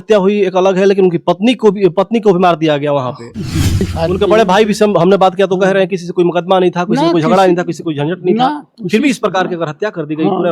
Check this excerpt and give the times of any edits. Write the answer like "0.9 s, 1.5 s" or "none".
3.9 s